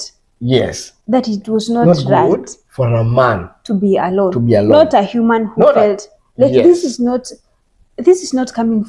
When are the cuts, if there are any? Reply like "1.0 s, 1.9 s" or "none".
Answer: none

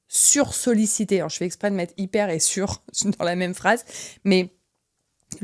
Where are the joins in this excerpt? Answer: none

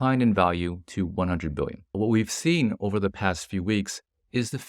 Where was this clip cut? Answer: 1.8 s

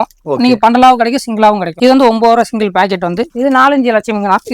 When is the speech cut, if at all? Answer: 1.7 s, 3.3 s

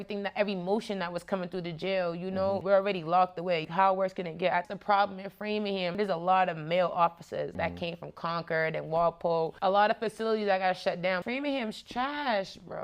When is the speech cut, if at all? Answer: 2.6 s, 5.9 s, 7.6 s, 9.5 s, 11.2 s

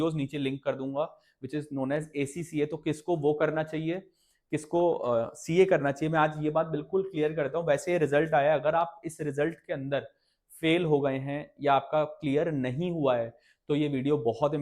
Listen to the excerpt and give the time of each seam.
none

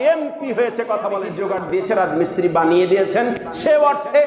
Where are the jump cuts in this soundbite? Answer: 1.4 s

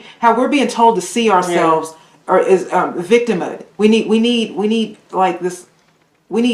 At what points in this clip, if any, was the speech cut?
none

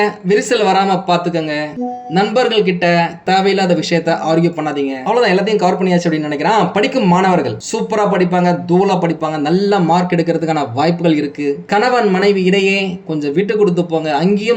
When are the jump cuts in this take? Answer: 3.2 s

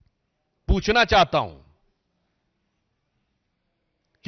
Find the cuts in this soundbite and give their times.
none

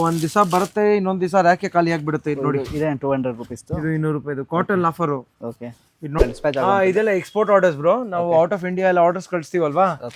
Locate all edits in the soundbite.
6.2 s

